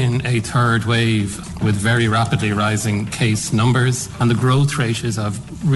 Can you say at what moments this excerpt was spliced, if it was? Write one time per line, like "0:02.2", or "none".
0:01.5
0:04.1

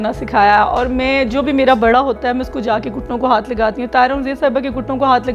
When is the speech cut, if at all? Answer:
none

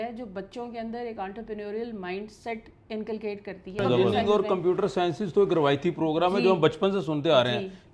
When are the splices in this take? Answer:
0:03.9

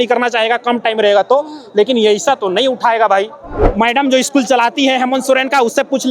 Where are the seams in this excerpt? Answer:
0:03.5

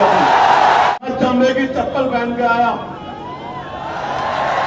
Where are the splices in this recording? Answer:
0:00.9

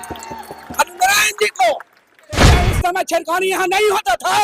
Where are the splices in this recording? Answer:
0:02.5

